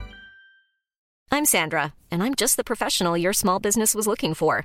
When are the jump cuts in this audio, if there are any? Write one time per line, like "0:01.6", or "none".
0:01.1